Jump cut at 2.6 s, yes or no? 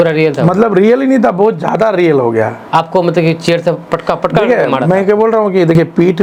no